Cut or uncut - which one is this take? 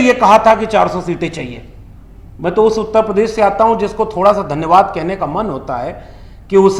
uncut